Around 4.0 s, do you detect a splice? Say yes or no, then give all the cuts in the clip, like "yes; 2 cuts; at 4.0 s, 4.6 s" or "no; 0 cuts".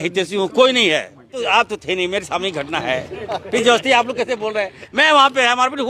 no; 1 cut; at 1.4 s